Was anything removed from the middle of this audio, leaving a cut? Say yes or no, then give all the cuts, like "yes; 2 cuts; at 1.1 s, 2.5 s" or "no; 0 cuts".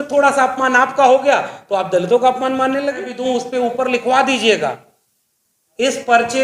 yes; 1 cut; at 3.1 s